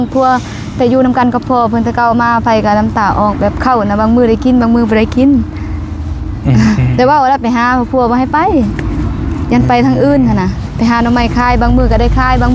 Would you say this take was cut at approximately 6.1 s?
no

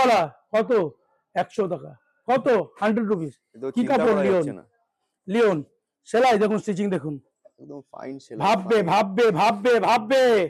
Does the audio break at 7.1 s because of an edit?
no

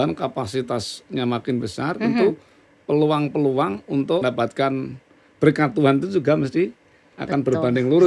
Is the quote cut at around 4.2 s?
yes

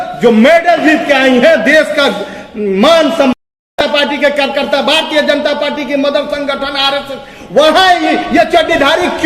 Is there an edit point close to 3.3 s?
yes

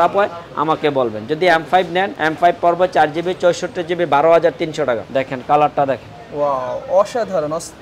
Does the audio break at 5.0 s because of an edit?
yes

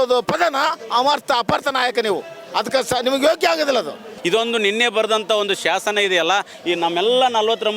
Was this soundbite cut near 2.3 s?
no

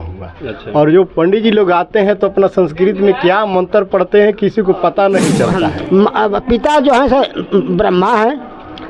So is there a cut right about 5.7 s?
yes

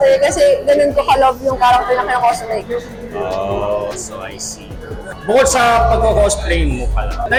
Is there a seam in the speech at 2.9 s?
no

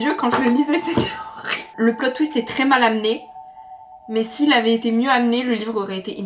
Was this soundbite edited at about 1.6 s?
yes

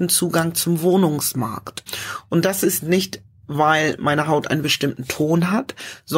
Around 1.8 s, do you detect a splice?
yes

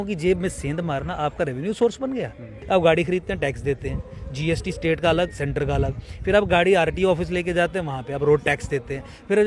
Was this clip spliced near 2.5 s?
yes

